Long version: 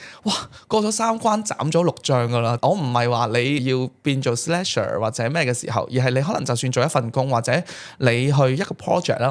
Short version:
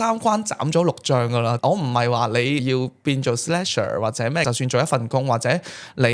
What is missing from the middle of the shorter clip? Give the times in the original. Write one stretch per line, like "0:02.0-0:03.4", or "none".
0:05.4-0:06.5